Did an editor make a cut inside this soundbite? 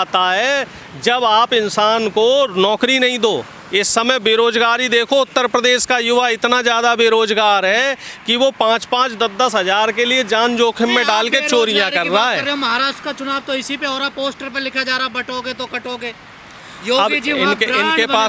no; 0 cuts

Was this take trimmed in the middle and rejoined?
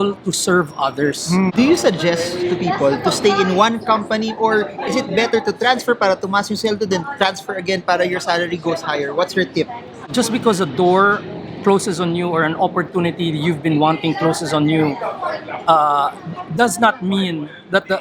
yes; 2 cuts; at 1.5 s, 10.1 s

